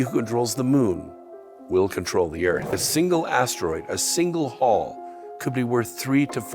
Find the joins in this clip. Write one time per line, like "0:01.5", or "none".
0:02.8

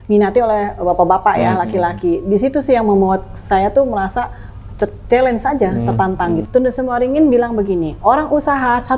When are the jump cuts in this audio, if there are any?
0:06.4

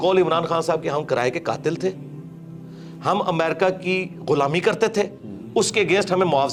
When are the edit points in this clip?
none

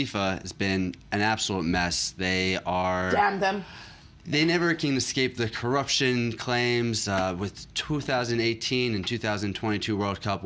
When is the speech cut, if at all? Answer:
none

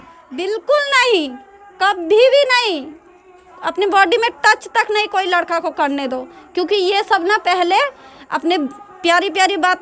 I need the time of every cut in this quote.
none

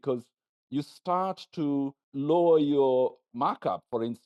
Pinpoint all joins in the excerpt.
0:02.0

